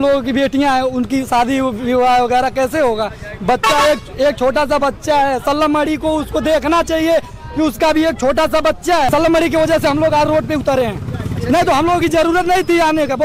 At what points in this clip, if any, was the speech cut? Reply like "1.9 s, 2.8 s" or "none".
9.1 s